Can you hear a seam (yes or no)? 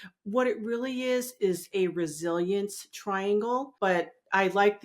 yes